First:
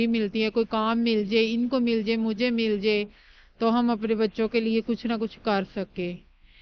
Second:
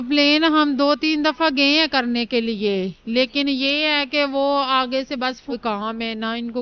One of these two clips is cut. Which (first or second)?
second